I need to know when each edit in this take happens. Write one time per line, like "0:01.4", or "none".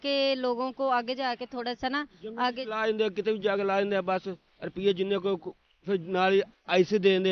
none